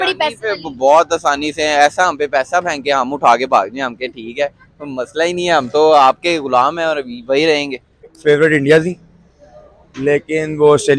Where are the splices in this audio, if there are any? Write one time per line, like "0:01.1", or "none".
0:08.1